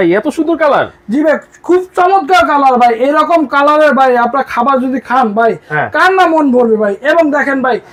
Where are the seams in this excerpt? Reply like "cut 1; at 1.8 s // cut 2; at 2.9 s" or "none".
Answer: none